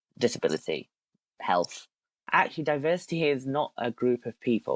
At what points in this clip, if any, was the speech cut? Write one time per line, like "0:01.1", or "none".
0:02.1